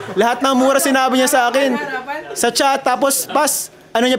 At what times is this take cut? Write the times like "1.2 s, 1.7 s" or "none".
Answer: none

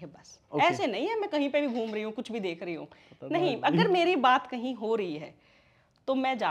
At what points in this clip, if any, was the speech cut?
none

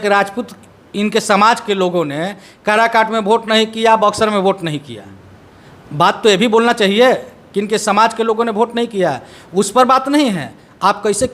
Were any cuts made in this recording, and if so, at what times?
none

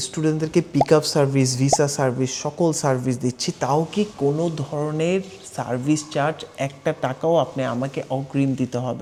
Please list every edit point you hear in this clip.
none

